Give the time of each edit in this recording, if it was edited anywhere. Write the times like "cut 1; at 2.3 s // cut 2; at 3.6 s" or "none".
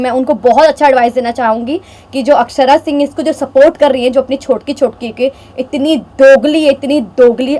none